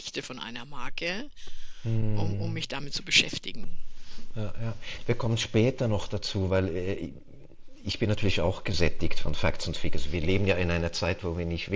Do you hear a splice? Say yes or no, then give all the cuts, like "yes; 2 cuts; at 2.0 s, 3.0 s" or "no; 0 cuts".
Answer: yes; 1 cut; at 4.8 s